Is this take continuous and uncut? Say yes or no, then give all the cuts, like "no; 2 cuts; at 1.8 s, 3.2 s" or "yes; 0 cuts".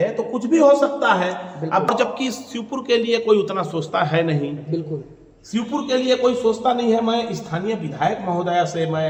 yes; 0 cuts